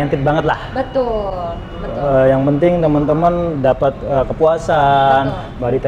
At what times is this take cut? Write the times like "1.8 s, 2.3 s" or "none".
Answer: none